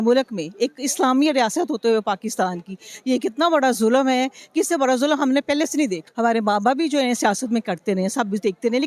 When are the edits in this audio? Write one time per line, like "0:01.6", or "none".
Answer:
0:06.0

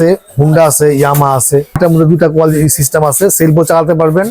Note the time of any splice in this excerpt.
0:01.8

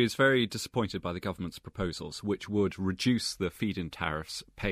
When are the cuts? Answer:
none

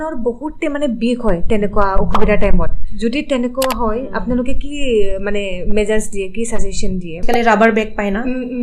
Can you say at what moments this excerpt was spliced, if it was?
0:02.8
0:07.2

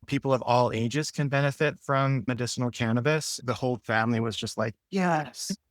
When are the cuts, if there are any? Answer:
0:02.3
0:03.5

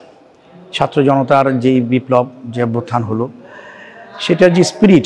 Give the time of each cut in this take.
none

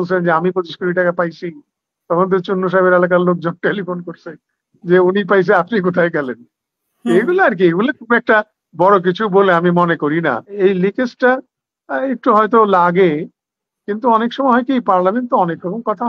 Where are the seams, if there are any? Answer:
0:10.5

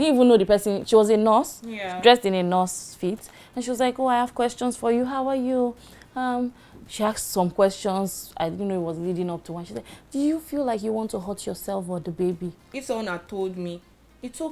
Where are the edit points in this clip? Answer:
0:12.8

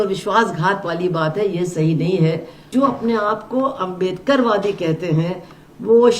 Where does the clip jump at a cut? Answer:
0:02.7

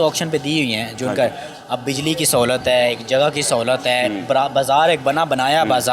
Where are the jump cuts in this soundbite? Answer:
none

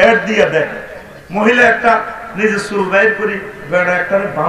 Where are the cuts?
none

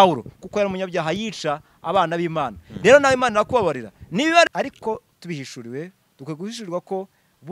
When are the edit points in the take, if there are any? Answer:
0:04.5

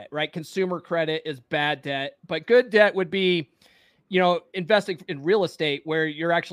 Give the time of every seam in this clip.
none

